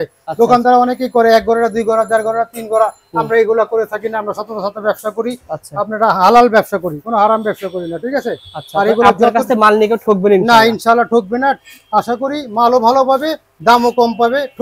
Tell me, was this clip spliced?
no; 0 cuts

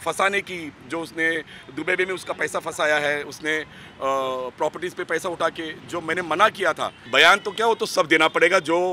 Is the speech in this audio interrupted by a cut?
yes; 1 cut; at 6.9 s

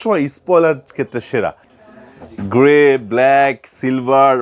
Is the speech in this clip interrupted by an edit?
yes; 1 cut; at 1.7 s

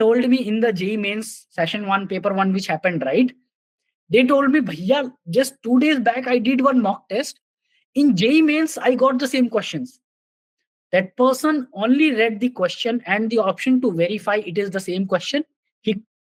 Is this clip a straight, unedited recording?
yes; 0 cuts

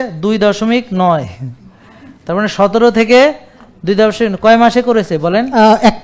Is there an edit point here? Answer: no; 0 cuts

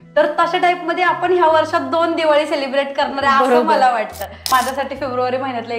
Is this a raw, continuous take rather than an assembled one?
no; 1 cut; at 4.5 s

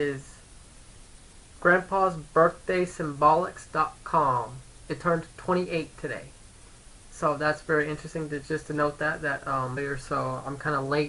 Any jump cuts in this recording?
no; 0 cuts

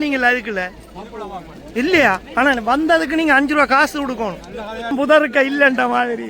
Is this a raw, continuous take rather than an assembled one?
no; 1 cut; at 4.9 s

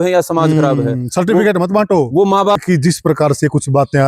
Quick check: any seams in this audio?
yes; 1 cut; at 2.6 s

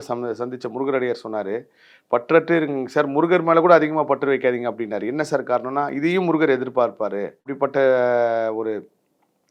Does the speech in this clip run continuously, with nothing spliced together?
yes; 0 cuts

